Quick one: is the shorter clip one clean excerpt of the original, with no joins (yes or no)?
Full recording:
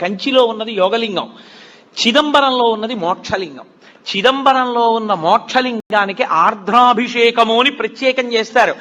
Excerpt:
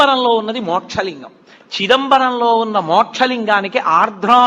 no